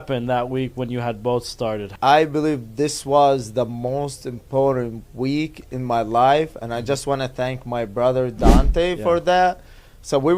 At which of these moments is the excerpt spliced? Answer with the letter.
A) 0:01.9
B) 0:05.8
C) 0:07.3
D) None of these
A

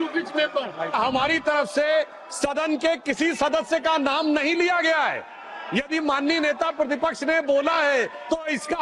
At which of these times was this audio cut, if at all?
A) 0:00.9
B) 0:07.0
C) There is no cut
A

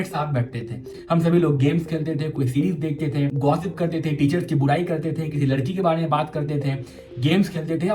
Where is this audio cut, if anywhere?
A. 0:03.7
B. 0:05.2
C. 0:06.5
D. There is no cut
D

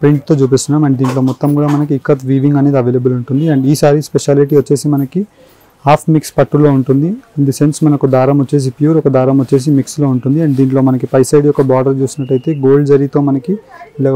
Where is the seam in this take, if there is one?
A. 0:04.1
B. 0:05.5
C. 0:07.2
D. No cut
D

